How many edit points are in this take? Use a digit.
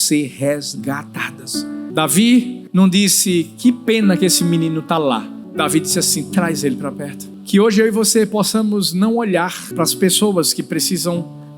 5